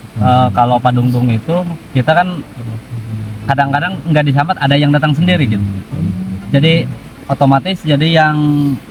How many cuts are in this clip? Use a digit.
0